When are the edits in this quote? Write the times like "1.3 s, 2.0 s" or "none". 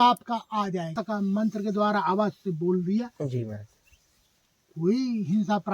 0.9 s